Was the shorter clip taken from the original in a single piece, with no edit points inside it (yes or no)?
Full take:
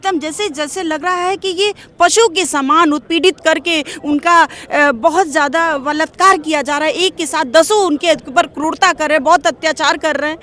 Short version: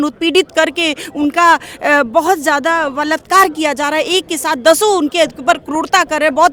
yes